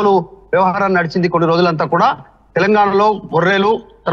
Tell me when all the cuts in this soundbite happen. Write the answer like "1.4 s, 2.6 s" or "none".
none